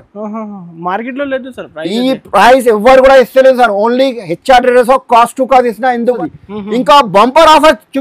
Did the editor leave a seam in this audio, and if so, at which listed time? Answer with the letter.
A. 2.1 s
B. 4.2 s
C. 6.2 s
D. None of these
C